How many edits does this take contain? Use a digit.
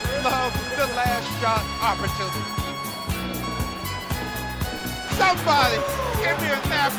0